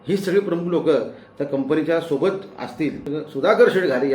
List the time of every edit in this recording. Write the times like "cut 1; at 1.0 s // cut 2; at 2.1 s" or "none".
cut 1; at 3.0 s